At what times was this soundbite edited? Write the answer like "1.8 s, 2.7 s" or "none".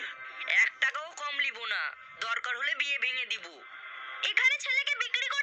none